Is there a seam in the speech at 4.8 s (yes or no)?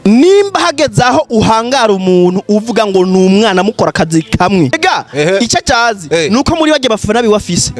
yes